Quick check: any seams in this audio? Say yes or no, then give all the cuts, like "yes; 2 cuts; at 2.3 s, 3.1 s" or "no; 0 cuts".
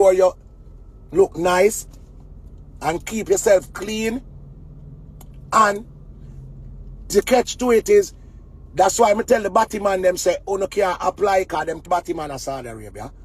yes; 1 cut; at 11.9 s